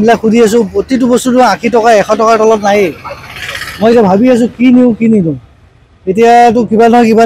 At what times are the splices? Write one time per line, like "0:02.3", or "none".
none